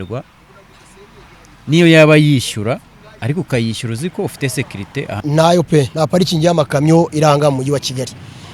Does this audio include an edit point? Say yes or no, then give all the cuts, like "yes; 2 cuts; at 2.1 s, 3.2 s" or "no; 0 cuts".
yes; 1 cut; at 5.2 s